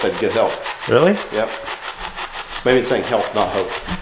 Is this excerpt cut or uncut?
uncut